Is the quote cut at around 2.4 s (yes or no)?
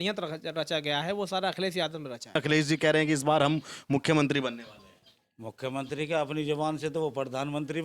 yes